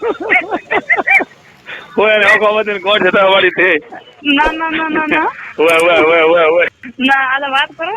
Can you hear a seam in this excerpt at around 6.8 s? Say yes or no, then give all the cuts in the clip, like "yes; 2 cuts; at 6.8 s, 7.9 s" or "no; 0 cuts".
yes; 1 cut; at 6.8 s